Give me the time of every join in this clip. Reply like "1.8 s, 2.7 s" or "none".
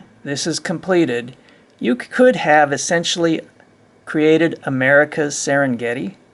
none